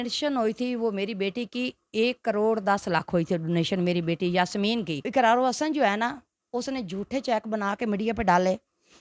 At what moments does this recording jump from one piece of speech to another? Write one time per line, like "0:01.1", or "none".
0:05.1